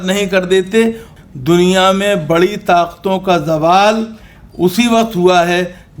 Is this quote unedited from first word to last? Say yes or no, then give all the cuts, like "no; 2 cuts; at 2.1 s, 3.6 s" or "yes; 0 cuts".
no; 1 cut; at 1.1 s